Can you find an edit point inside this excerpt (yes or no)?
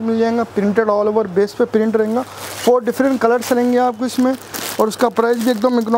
no